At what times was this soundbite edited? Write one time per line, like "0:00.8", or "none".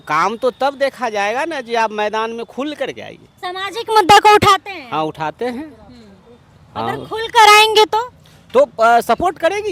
none